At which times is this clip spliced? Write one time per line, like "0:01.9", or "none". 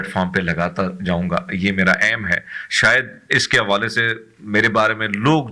none